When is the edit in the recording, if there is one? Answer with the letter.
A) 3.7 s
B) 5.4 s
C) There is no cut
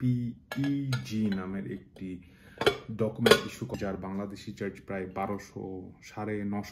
A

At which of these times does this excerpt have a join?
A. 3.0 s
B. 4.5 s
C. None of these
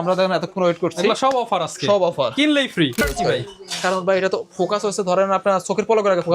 A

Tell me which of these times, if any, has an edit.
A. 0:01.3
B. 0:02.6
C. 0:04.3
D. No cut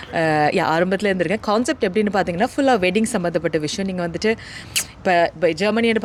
D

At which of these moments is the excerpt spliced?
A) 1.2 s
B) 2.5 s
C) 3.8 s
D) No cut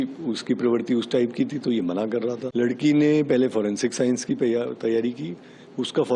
B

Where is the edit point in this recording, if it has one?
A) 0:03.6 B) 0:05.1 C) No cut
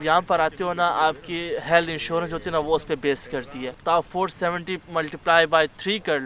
A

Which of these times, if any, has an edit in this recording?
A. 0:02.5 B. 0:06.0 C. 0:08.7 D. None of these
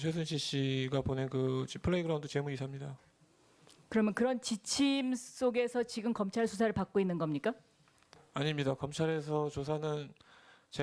D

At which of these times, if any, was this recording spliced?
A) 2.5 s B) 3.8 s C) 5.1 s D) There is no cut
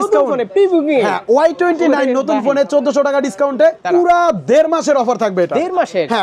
B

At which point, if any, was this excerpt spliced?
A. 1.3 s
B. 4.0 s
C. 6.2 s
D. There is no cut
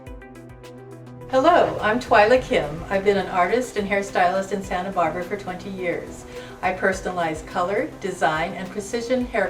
A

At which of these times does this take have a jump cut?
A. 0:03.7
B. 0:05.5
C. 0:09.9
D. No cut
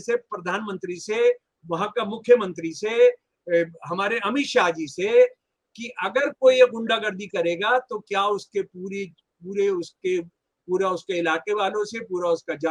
D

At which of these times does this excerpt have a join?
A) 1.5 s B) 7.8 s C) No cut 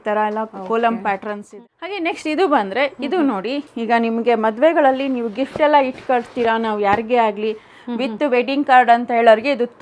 A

